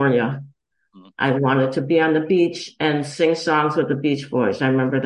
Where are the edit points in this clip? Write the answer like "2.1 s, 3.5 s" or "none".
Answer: none